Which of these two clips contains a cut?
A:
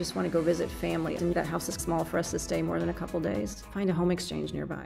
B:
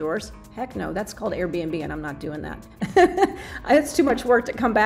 A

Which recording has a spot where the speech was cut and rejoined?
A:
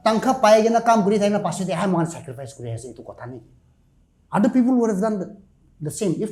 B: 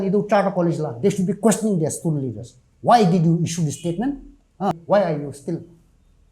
B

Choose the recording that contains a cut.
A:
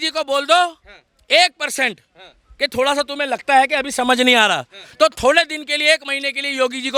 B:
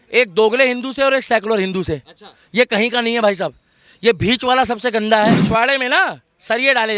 B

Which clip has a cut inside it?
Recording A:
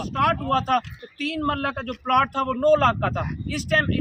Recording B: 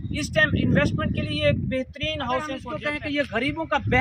B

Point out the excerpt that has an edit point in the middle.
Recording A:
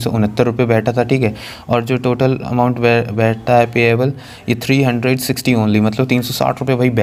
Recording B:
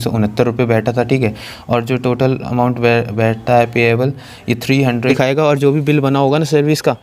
B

